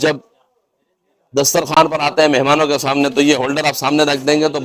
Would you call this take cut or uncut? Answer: uncut